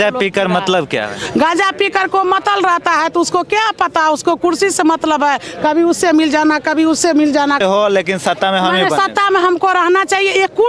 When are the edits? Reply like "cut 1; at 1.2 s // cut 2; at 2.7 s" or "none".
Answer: cut 1; at 7.6 s